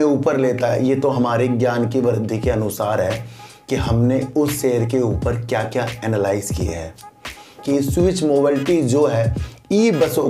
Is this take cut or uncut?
cut